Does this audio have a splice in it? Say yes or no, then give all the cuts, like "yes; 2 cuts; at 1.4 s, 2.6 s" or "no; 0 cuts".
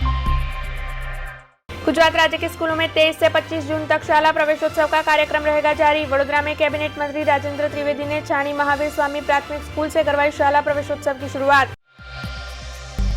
yes; 1 cut; at 1.7 s